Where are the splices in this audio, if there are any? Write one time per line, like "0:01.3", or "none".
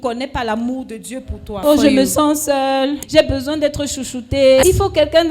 0:01.6
0:03.0
0:04.6